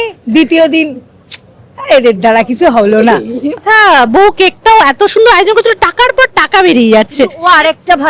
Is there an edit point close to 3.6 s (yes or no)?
yes